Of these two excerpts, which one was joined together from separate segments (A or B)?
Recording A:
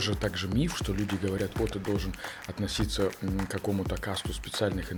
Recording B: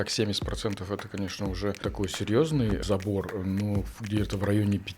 B